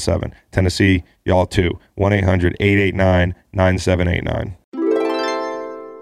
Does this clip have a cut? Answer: yes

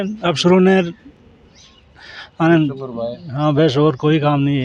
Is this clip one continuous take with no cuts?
yes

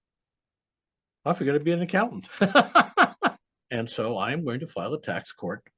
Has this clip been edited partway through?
yes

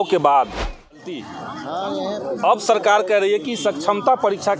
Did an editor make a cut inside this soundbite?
yes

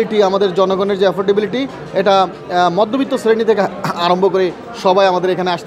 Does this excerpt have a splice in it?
no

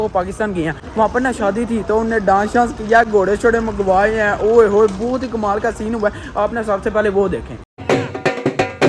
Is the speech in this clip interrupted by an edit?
no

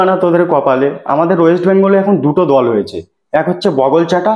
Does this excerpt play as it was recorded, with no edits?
no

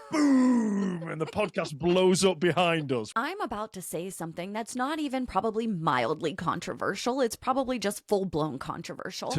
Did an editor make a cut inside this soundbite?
yes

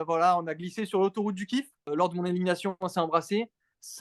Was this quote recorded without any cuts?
no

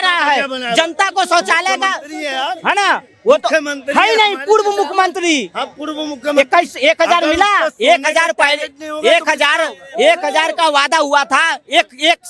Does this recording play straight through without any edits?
yes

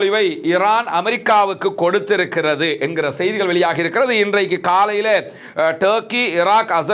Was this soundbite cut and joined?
no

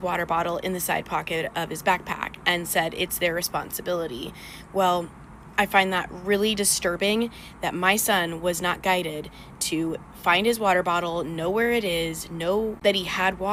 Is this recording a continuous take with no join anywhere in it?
yes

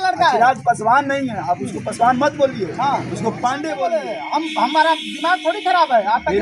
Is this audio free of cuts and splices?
no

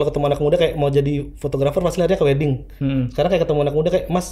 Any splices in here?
no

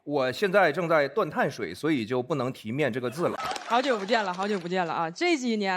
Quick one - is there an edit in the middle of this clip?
yes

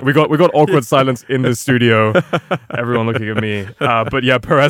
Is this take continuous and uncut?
yes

